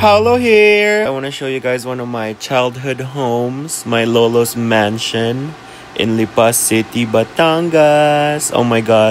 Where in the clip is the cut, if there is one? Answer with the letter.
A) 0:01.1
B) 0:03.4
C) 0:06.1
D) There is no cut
A